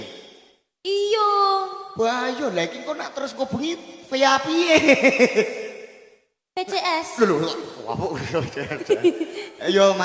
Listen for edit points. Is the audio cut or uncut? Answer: uncut